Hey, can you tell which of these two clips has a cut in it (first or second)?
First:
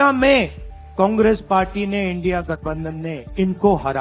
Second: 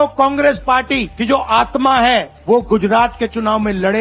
second